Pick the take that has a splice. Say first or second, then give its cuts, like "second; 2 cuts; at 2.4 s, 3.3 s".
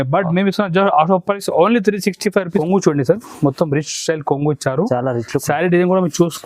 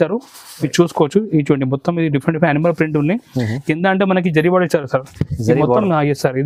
first; 1 cut; at 2.6 s